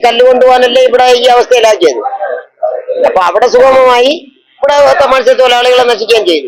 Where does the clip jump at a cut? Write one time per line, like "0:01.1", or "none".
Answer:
none